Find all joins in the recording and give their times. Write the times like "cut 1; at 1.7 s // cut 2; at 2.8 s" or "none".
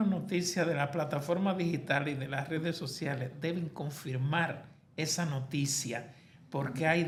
none

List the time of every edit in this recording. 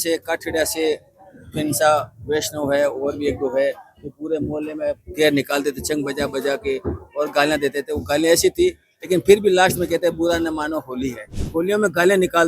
cut 1; at 11.4 s

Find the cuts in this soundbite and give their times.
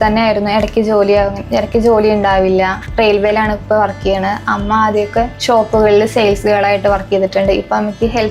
cut 1; at 2.8 s // cut 2; at 5.4 s

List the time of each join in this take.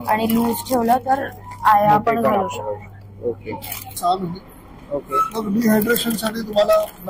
cut 1; at 4.0 s

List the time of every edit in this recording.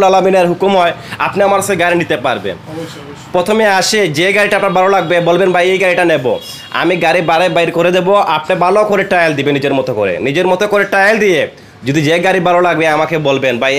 none

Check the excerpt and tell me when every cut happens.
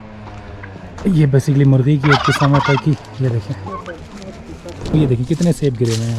cut 1; at 4.9 s

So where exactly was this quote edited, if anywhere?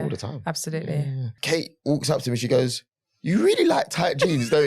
cut 1; at 1.4 s

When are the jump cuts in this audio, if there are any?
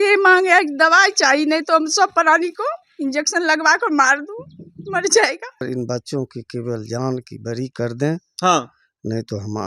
cut 1; at 5.6 s

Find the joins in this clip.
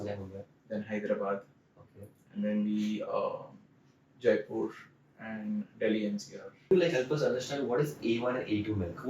cut 1; at 6.7 s

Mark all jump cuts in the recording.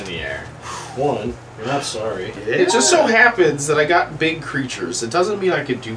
cut 1; at 2.4 s

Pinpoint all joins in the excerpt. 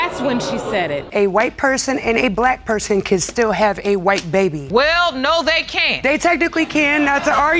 cut 1; at 1.1 s

